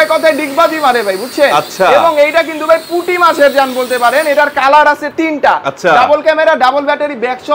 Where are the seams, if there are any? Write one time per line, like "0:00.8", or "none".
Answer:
none